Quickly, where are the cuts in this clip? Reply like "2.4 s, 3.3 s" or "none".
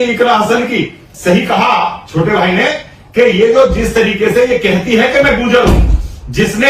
1.0 s